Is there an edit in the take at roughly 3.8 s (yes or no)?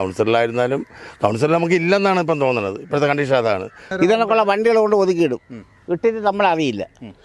yes